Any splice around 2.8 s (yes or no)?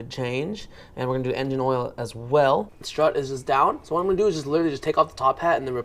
yes